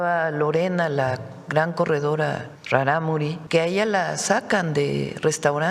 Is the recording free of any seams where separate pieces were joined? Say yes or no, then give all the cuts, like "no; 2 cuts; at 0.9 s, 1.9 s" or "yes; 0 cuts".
no; 2 cuts; at 2.5 s, 3.4 s